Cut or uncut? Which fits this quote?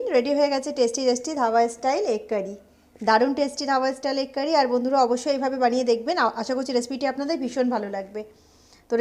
uncut